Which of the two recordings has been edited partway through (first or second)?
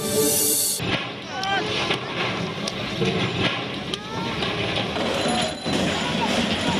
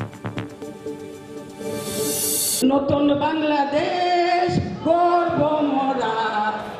second